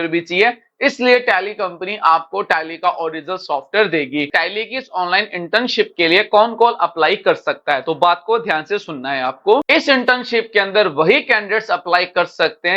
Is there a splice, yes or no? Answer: yes